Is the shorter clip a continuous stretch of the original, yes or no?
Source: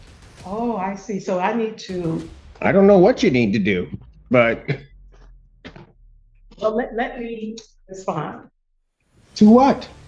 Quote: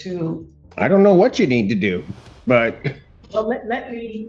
no